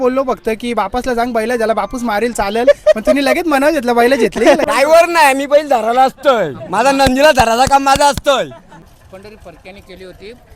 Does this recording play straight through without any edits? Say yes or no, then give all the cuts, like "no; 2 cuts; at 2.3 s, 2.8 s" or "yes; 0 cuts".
no; 2 cuts; at 4.6 s, 8.9 s